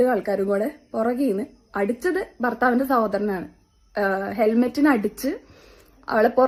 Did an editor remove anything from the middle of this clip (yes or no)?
no